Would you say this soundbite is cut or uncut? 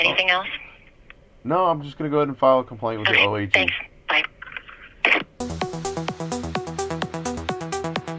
cut